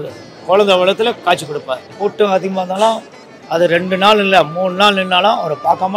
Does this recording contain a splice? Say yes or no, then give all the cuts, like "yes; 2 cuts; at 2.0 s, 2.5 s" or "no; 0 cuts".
yes; 1 cut; at 1.8 s